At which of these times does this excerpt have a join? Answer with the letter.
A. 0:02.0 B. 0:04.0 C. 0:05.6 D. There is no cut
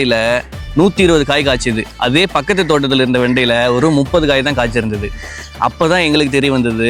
D